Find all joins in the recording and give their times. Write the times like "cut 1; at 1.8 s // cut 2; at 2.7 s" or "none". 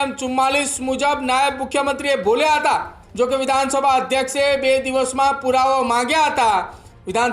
cut 1; at 3.0 s